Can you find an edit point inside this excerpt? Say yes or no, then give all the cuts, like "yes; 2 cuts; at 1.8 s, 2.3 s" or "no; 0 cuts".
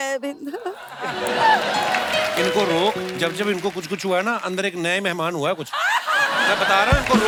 no; 0 cuts